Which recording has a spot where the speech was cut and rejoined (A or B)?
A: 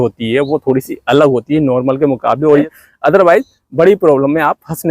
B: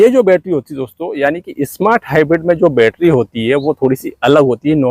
A